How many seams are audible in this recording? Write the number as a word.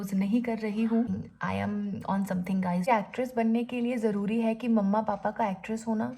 two